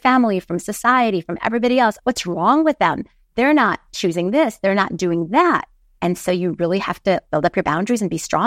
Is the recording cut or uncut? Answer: cut